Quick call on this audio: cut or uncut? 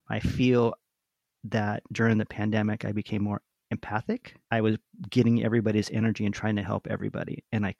uncut